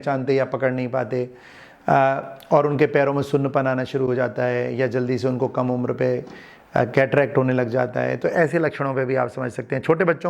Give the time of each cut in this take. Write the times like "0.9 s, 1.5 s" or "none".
none